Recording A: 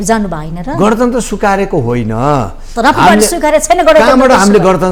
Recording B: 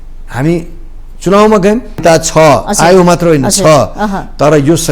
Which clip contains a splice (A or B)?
B